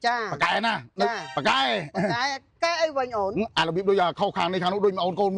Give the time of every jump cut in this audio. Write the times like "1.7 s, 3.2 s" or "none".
1.3 s